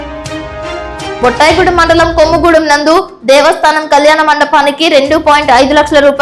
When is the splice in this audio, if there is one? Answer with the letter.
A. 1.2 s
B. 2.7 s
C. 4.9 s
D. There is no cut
A